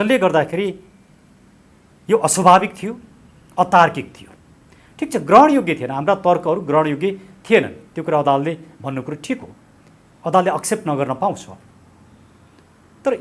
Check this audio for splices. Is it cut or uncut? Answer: uncut